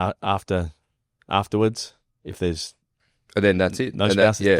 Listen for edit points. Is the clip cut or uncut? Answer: uncut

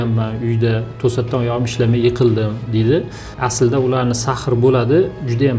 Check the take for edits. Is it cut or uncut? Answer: cut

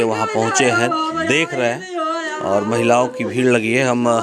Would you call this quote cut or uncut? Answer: uncut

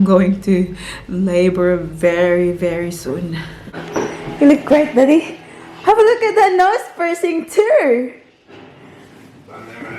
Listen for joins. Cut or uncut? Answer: cut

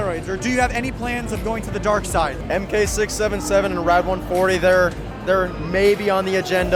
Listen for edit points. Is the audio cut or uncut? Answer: uncut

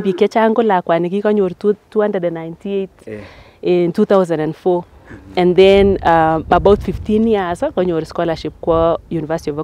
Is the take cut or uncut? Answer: uncut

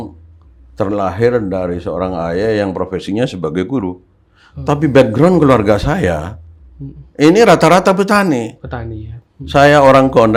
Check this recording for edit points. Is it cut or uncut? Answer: uncut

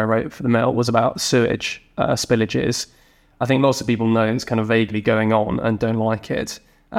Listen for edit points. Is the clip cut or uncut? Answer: uncut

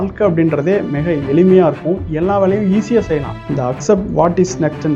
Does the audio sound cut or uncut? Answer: cut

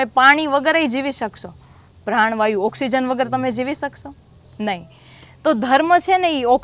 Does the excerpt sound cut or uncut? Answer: uncut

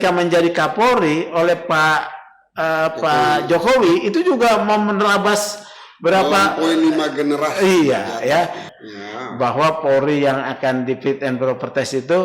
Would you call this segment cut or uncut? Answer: cut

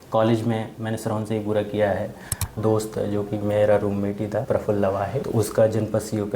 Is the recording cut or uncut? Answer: cut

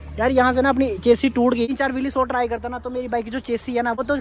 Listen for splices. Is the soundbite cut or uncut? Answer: cut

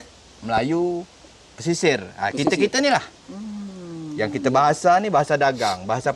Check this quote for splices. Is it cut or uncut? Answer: uncut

